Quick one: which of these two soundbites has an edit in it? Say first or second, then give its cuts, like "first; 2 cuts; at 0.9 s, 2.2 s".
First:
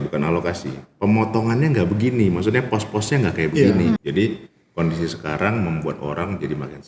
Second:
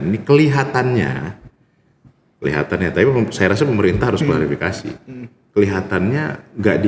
first; 1 cut; at 4.0 s